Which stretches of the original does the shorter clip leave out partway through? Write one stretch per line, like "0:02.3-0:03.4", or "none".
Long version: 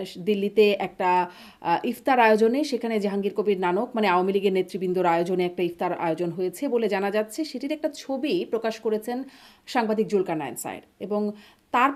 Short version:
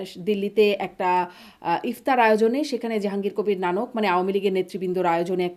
none